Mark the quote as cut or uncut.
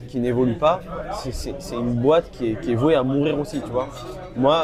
uncut